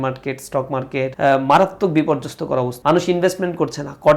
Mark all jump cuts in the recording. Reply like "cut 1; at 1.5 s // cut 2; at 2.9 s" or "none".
cut 1; at 1.1 s // cut 2; at 2.7 s